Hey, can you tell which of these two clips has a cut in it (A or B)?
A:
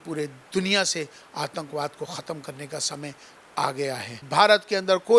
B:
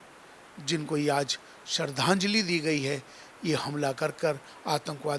A